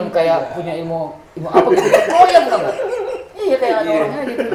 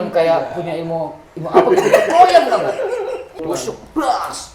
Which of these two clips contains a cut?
second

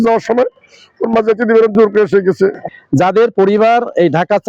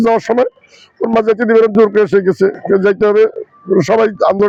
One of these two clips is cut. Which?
first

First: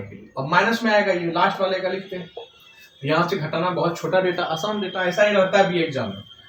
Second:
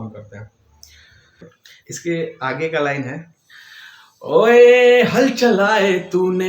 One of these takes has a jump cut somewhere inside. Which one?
second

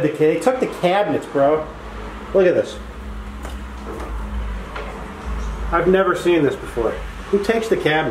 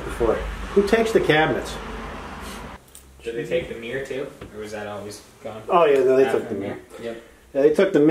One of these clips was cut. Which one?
second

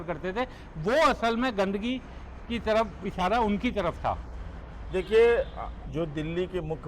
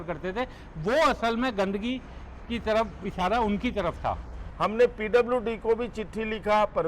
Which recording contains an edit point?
second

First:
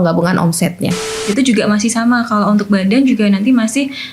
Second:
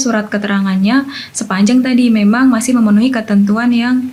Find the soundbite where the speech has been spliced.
first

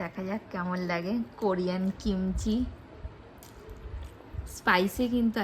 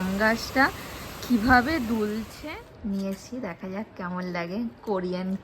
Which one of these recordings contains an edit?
second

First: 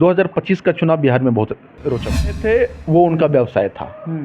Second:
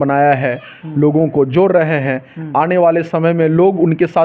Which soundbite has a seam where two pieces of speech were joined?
first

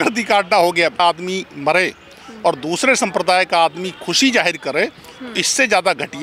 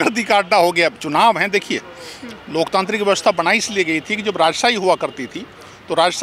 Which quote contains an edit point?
first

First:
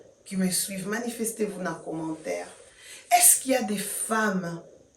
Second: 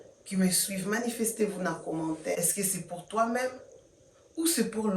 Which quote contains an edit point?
second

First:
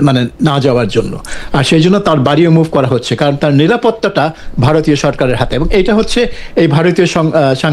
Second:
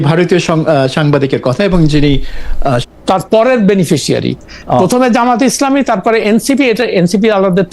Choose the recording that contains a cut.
second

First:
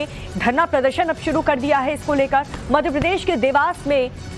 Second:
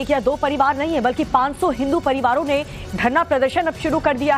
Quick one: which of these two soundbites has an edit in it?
first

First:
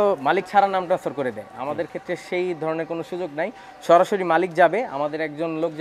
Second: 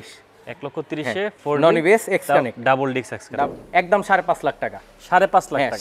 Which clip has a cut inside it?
second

